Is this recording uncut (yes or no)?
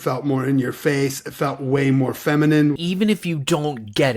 no